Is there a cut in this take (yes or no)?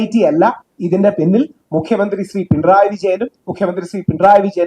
no